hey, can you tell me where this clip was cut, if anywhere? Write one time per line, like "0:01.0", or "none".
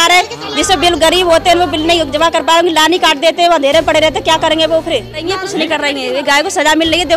0:05.2